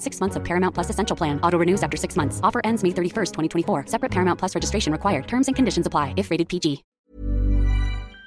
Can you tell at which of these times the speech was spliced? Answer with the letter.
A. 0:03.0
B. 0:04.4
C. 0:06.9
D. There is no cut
C